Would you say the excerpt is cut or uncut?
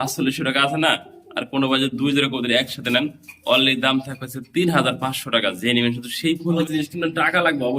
cut